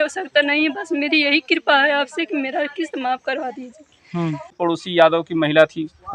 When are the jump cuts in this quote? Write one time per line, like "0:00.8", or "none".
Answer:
0:04.5